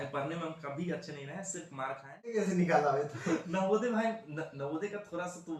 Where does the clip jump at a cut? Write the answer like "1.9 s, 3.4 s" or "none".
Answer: 2.3 s